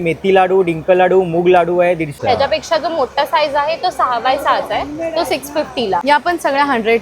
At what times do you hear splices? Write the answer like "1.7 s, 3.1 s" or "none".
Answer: 2.1 s, 6.0 s